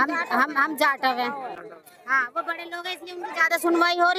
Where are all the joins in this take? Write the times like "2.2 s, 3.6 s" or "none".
none